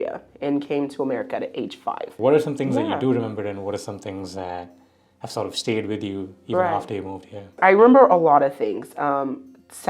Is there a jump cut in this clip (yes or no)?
yes